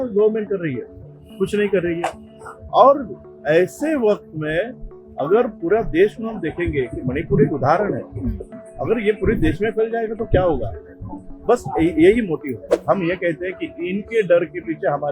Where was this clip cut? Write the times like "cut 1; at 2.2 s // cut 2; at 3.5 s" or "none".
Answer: cut 1; at 12.8 s